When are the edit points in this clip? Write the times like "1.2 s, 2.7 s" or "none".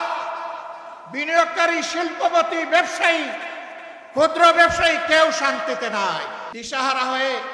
6.5 s